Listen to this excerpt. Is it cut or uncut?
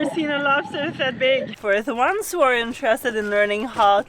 cut